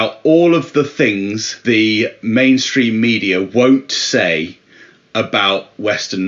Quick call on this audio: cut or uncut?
cut